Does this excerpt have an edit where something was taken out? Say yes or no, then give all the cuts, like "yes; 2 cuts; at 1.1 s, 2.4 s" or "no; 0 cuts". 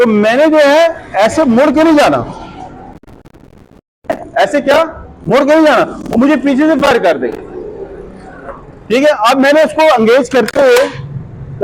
no; 0 cuts